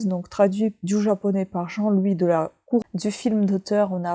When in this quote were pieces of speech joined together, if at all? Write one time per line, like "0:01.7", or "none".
0:02.8